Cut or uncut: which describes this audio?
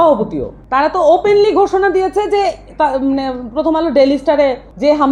uncut